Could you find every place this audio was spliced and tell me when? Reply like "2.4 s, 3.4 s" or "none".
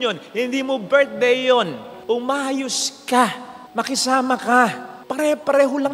none